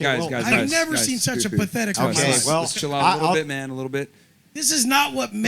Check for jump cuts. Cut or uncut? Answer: cut